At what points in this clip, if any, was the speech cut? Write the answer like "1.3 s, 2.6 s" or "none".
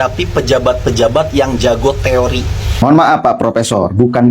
2.7 s